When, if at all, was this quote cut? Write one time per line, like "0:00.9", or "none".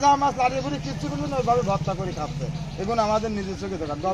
none